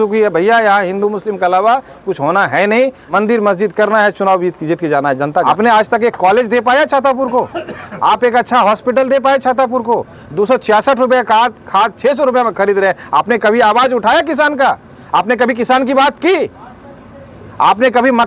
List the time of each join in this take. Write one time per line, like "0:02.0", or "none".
0:03.0
0:05.5